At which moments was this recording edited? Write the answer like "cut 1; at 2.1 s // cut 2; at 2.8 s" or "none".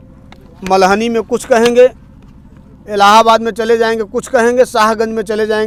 none